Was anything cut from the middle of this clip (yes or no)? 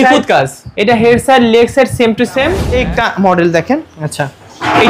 yes